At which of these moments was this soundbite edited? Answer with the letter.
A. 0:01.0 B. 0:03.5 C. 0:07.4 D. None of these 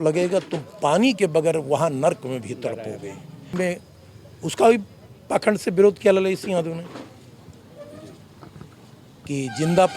B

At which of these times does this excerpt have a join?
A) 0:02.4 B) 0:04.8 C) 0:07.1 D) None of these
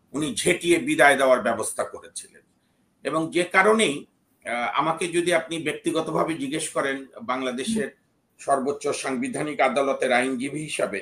D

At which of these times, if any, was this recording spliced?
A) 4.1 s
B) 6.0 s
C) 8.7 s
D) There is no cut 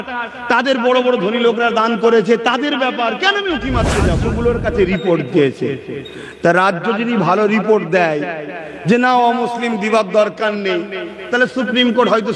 A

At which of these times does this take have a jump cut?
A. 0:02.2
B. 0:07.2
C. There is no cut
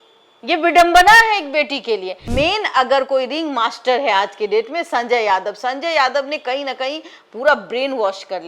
A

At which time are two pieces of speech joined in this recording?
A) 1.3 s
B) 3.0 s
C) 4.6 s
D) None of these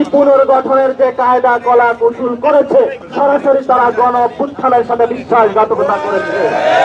B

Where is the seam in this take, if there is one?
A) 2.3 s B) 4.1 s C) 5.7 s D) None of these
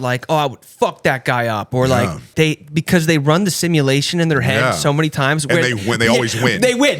A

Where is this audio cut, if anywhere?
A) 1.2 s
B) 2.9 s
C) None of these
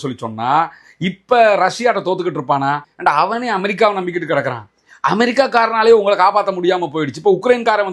B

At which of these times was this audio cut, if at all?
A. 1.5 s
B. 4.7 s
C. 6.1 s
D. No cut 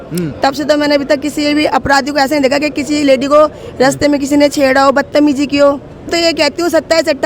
C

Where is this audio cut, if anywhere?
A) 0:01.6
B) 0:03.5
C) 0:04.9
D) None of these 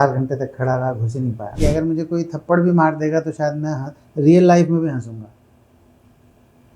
A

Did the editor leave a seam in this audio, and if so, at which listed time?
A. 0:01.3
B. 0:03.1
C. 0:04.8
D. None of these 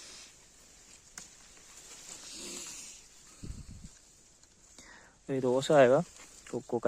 D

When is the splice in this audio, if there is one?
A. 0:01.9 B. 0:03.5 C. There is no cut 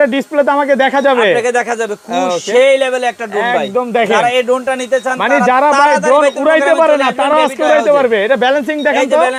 C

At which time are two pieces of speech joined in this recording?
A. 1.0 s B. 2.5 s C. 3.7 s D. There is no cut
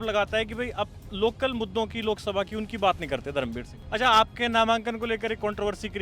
C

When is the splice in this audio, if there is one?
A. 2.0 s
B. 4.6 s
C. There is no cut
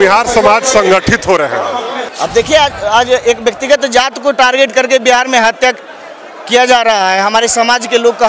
A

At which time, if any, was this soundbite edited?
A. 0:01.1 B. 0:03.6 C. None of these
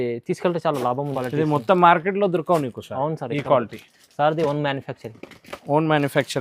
A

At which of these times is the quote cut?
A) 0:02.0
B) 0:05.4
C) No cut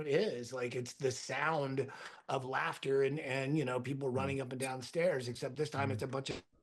C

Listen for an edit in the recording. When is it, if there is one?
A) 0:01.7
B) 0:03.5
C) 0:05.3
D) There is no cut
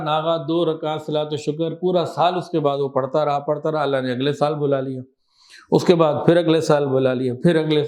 D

